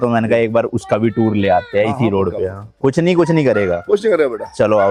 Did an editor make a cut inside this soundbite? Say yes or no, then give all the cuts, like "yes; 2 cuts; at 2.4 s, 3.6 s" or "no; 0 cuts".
no; 0 cuts